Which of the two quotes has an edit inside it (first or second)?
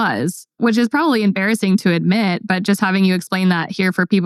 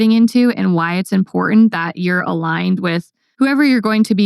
second